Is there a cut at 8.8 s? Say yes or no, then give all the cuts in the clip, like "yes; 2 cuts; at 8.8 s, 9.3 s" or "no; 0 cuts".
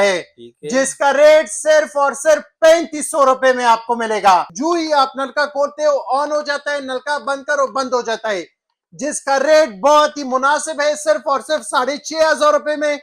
no; 1 cut; at 4.5 s